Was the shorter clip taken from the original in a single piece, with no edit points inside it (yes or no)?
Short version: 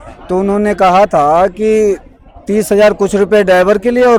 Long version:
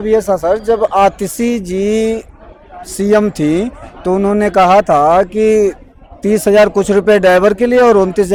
yes